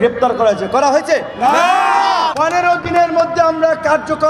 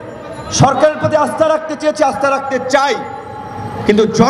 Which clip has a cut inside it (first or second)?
first